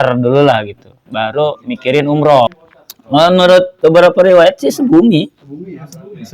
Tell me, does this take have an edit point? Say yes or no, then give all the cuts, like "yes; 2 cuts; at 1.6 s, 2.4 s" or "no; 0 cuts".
yes; 1 cut; at 2.5 s